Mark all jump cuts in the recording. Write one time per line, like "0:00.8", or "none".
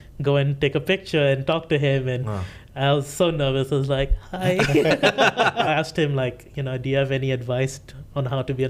0:05.7